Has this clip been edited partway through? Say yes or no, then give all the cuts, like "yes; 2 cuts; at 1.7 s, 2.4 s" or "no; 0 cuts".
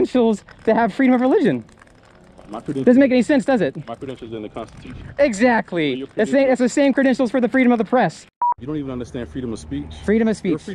yes; 1 cut; at 8.4 s